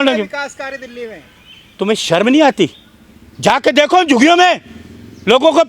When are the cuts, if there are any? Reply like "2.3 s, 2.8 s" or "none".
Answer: none